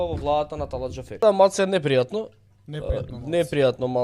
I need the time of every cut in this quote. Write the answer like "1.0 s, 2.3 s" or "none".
1.2 s